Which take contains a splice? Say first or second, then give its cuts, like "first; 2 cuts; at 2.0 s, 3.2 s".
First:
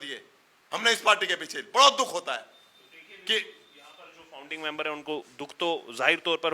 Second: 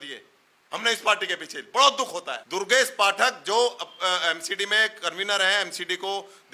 second; 1 cut; at 2.4 s